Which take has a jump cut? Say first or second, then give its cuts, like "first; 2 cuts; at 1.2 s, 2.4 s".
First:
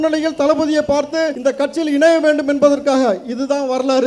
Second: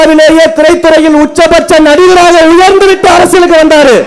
first; 1 cut; at 1.3 s